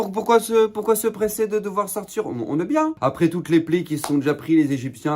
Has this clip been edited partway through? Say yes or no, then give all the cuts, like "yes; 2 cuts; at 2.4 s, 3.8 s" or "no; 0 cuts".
yes; 1 cut; at 3.0 s